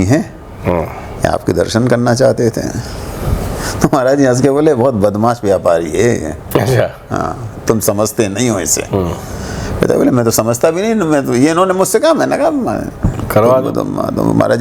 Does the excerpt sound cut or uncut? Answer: uncut